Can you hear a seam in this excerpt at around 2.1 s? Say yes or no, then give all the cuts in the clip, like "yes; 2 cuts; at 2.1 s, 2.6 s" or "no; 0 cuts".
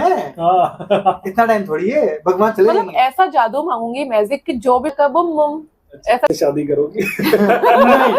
no; 2 cuts; at 4.9 s, 6.3 s